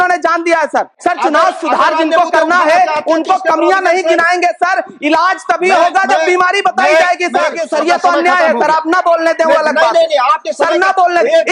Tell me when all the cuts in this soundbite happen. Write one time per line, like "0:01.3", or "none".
0:00.9
0:07.6